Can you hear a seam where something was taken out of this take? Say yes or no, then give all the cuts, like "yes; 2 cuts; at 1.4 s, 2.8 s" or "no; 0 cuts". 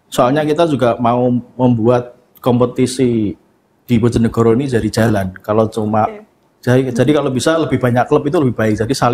no; 0 cuts